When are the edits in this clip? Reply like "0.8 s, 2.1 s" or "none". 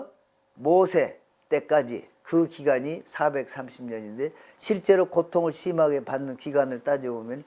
none